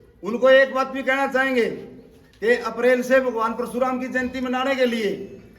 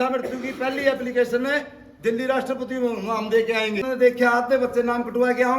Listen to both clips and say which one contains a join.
second; 1 cut; at 3.9 s

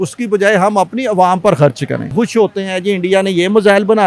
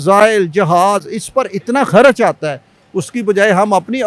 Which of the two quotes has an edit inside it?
first; 1 cut; at 2.1 s

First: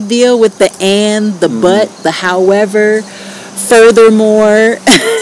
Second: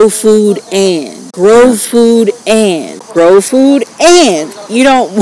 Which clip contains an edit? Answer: second; 2 cuts; at 1.3 s, 2.9 s

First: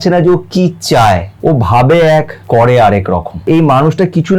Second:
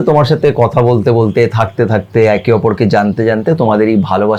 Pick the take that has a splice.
first; 3 cuts; at 1.3 s, 2.4 s, 3.5 s

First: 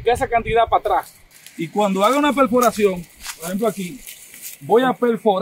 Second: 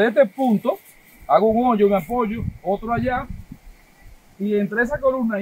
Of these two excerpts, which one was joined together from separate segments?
first; 1 cut; at 1.3 s

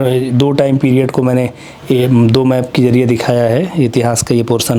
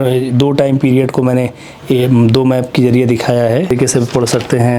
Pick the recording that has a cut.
second; 1 cut; at 3.7 s

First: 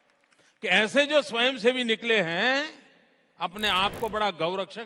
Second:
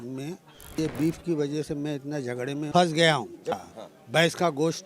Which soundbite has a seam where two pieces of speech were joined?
second; 3 cuts; at 0.8 s, 2.7 s, 3.6 s

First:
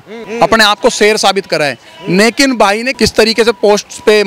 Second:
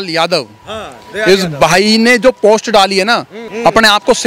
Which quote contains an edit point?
first; 1 cut; at 2.9 s

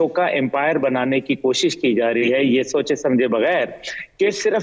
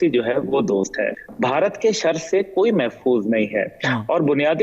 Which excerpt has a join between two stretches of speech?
second; 1 cut; at 1.2 s

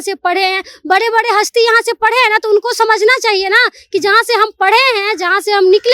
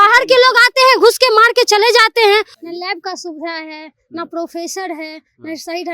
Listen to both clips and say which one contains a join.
second; 1 cut; at 2.5 s

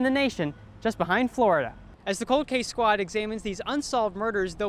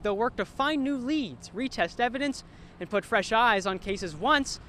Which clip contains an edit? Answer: first; 1 cut; at 1.8 s

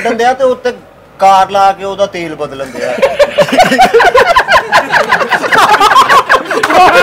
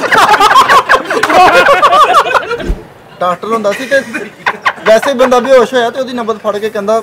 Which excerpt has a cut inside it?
second; 1 cut; at 2.6 s

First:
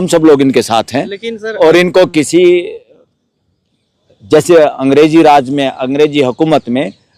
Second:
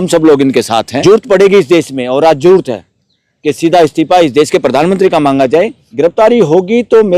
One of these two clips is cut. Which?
second; 2 cuts; at 1.0 s, 5.8 s

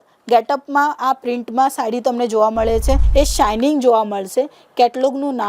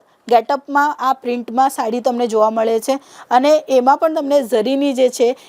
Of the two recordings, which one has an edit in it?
first; 1 cut; at 3.0 s

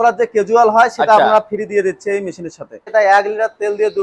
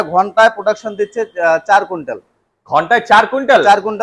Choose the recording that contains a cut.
first; 1 cut; at 2.8 s

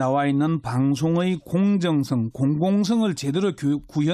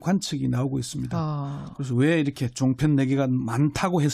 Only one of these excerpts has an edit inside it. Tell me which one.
second; 1 cut; at 1.0 s

